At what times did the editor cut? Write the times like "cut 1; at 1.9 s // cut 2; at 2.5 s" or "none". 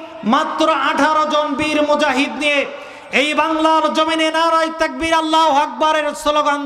none